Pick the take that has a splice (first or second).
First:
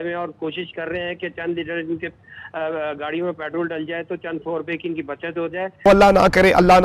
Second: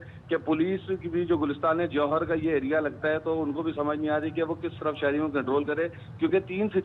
first